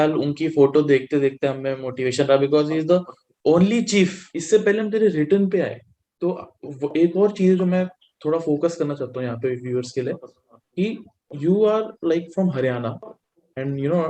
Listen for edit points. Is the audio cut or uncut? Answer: cut